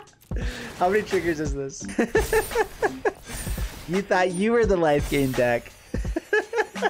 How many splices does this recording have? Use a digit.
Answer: 2